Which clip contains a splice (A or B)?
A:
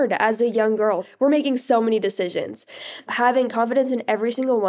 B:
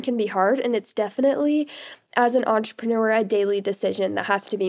A